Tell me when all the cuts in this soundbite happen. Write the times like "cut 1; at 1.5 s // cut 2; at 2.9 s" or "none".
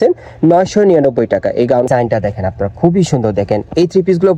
cut 1; at 1.9 s